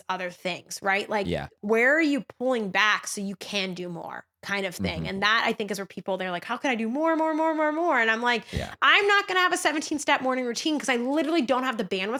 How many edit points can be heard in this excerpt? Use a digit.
0